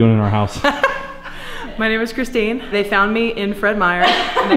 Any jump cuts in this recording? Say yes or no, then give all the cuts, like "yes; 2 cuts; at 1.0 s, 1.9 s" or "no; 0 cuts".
yes; 1 cut; at 2.6 s